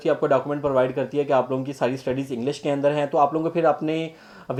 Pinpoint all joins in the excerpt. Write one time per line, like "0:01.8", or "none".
none

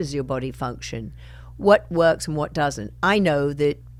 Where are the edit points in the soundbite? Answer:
none

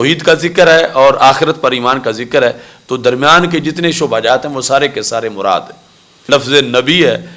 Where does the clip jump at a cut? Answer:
0:06.3

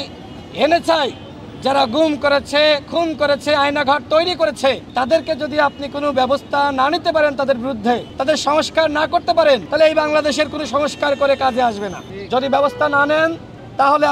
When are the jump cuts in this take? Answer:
0:04.8
0:08.1
0:09.7
0:12.1

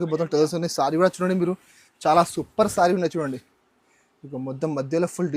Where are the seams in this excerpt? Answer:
none

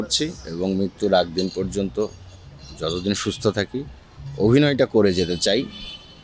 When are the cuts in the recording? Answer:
none

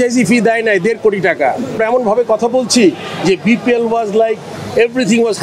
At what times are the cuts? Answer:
0:01.8

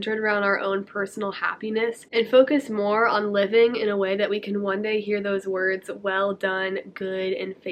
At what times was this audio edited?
0:02.0

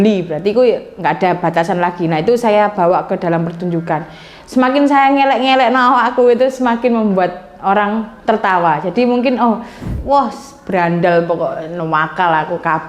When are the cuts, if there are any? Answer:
0:09.9

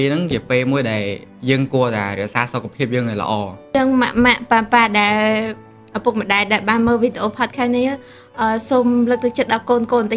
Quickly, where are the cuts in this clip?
0:03.7

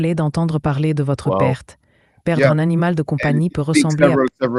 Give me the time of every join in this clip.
none

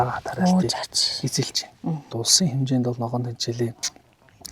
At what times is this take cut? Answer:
0:02.2

